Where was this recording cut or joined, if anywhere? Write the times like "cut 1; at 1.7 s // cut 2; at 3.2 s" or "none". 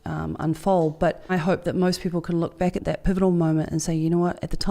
cut 1; at 1.3 s // cut 2; at 2.8 s